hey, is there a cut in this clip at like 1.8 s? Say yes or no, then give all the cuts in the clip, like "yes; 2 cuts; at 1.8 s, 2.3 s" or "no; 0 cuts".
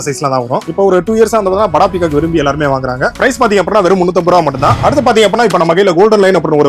no; 1 cut; at 4.8 s